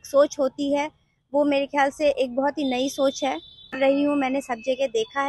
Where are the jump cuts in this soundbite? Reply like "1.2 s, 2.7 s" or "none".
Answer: 3.8 s